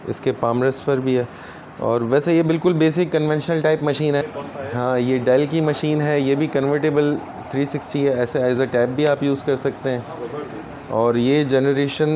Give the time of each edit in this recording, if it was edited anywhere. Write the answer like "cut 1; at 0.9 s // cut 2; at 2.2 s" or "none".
cut 1; at 4.2 s

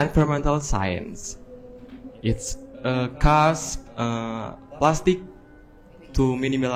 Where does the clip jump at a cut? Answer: none

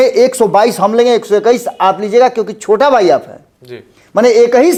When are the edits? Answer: none

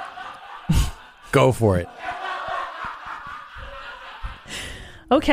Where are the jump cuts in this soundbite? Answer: cut 1; at 4.4 s

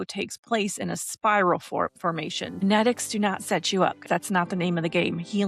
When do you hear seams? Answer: cut 1; at 2.6 s // cut 2; at 4.0 s

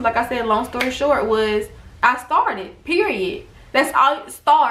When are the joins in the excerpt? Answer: cut 1; at 1.8 s

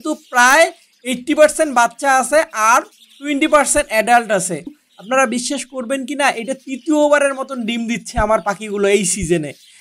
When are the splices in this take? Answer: cut 1; at 4.9 s

